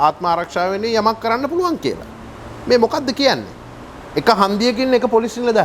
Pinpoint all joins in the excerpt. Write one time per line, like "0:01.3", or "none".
none